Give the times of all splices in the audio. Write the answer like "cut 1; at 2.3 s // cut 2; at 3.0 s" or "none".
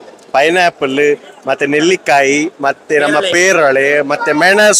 none